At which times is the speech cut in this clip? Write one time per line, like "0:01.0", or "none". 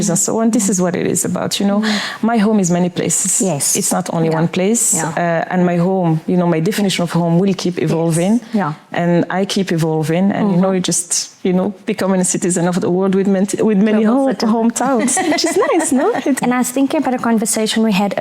0:16.4